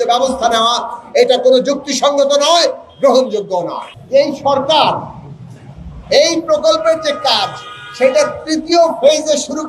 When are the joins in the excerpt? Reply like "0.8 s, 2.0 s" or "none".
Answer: 3.9 s